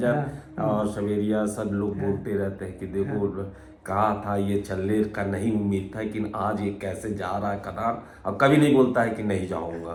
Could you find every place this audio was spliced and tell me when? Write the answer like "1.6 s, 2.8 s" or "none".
none

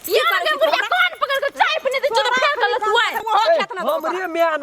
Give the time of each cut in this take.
3.2 s

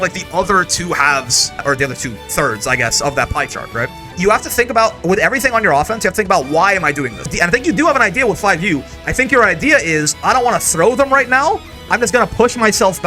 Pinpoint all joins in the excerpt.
1.6 s, 4.0 s, 7.3 s

